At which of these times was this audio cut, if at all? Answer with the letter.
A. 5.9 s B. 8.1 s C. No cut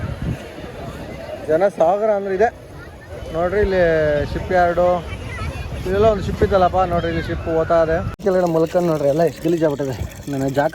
B